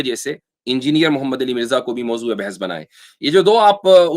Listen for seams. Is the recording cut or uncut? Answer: uncut